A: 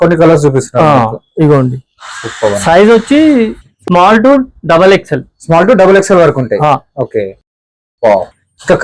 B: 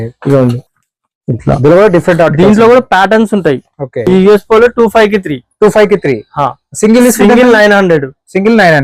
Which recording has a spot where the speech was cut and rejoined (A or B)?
B